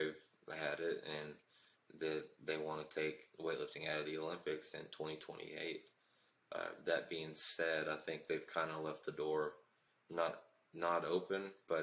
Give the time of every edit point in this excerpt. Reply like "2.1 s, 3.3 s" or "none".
none